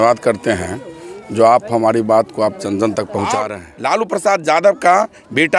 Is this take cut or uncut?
cut